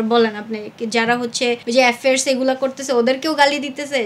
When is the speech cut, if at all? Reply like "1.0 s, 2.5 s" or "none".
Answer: 1.6 s